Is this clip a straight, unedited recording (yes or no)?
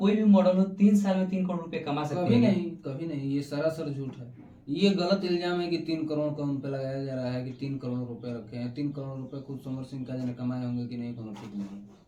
yes